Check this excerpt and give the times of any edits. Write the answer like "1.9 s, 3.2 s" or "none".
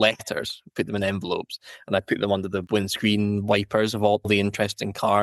none